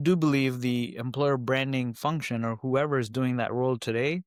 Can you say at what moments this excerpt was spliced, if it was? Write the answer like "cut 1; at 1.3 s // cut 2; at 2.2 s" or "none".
none